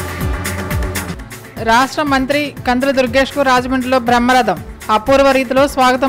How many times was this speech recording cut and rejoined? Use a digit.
1